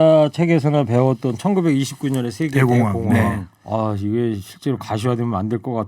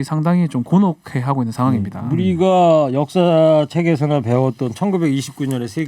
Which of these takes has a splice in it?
first; 1 cut; at 3.5 s

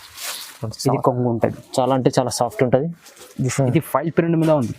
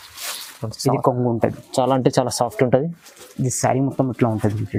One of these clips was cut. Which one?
first; 1 cut; at 3.5 s

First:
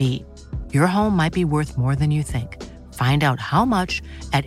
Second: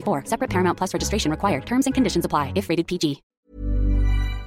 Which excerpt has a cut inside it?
second; 1 cut; at 3.5 s

